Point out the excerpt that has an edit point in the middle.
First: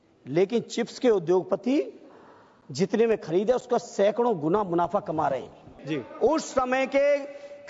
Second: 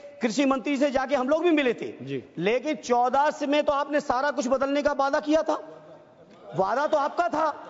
first; 1 cut; at 5.8 s

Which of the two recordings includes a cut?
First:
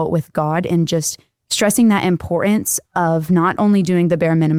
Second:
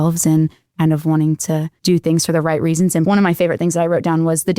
second; 2 cuts; at 1.7 s, 3.0 s

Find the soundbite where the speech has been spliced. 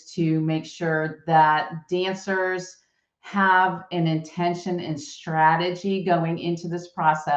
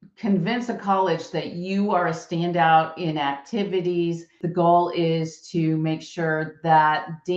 second; 1 cut; at 4.4 s

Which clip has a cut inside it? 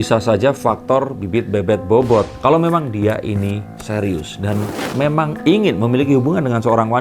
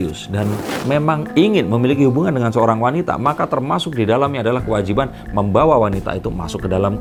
first; 1 cut; at 2.3 s

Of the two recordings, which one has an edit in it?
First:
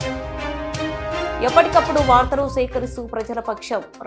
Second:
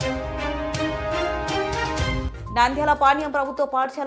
first; 1 cut; at 1.4 s

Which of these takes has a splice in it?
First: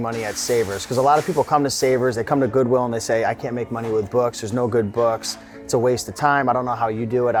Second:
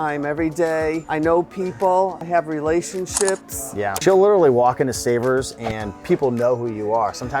second; 3 cuts; at 1.0 s, 2.2 s, 4.0 s

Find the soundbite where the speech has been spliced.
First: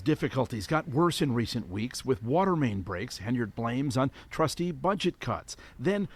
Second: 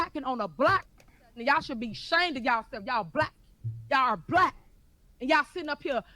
second; 1 cut; at 0.9 s

